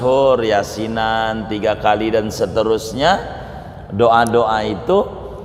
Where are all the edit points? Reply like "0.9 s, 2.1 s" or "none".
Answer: none